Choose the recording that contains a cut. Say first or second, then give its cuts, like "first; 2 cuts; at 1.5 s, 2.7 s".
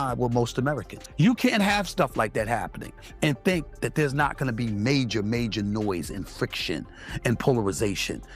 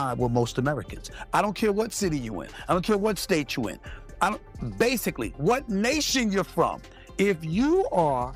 first; 1 cut; at 1.0 s